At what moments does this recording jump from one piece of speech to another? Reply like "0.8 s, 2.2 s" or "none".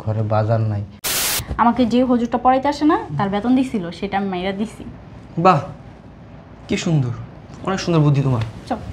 1.3 s